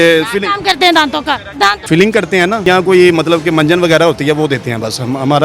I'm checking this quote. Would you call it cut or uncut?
cut